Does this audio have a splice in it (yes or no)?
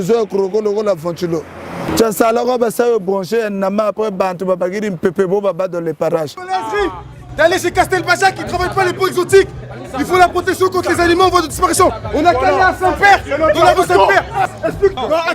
yes